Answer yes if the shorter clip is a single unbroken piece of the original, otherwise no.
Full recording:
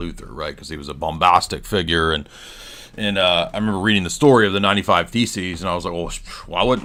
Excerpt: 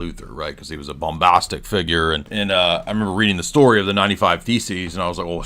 no